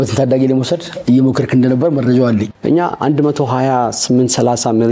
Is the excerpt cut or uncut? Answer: cut